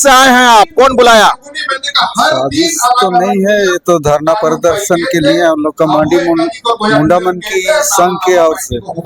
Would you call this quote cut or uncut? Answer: uncut